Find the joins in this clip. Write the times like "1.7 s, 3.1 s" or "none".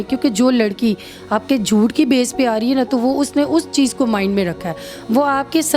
none